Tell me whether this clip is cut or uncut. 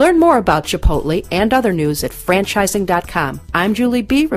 cut